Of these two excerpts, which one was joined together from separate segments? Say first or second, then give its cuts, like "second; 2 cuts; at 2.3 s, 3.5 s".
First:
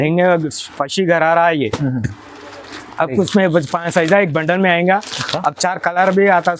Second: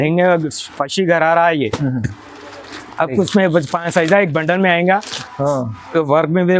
second; 1 cut; at 5.2 s